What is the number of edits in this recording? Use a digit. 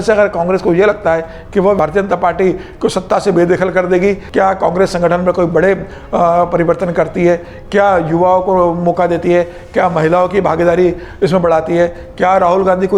2